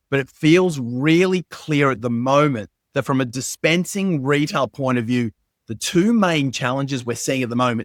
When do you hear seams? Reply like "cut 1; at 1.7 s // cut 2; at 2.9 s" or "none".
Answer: none